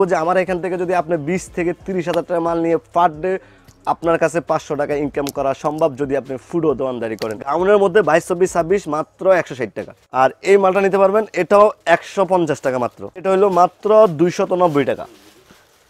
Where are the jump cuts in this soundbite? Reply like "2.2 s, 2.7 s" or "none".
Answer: 7.6 s, 13.2 s